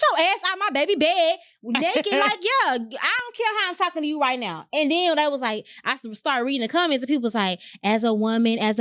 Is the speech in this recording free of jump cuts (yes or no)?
yes